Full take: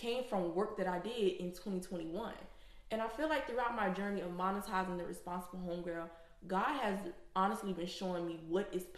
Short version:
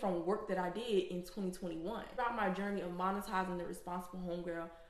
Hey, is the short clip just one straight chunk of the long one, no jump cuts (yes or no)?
no